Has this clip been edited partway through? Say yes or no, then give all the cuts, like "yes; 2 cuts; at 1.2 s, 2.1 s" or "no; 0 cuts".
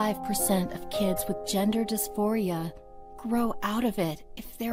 no; 0 cuts